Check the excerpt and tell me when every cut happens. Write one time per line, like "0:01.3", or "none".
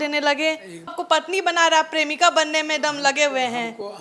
0:00.9

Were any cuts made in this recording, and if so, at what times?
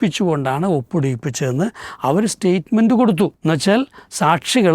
0:03.4

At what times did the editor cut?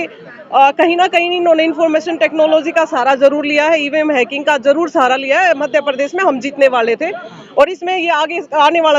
none

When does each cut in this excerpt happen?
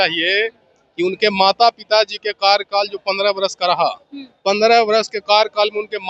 none

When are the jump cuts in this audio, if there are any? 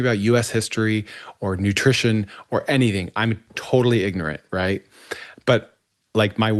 none

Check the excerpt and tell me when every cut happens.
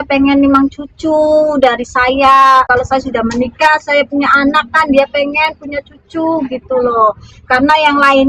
0:02.7

